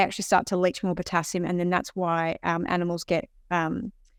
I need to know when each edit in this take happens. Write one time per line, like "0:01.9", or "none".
none